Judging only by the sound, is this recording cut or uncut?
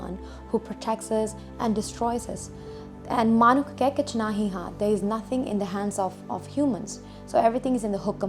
uncut